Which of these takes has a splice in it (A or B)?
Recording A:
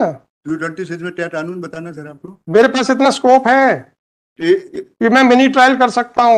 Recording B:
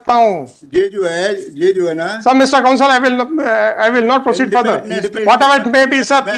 B